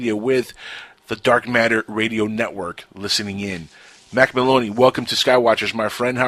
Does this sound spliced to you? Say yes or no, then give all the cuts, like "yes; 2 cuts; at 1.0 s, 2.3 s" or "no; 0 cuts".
no; 0 cuts